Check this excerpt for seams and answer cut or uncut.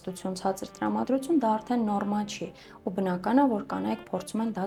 uncut